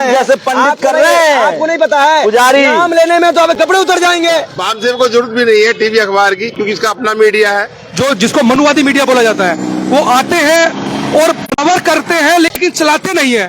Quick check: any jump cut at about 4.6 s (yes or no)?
yes